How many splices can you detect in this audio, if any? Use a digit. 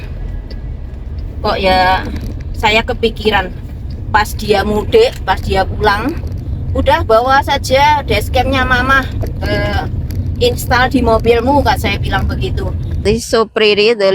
1